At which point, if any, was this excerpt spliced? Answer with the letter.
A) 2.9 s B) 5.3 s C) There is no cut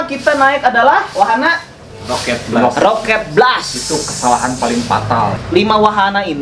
B